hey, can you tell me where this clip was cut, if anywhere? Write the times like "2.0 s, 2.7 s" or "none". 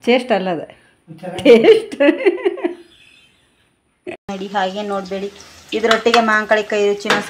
4.3 s